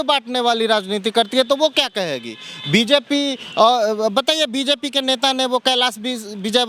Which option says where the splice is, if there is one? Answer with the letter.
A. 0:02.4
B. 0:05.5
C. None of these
C